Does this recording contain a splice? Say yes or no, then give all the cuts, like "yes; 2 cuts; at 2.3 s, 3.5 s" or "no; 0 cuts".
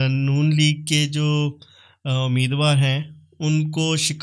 no; 0 cuts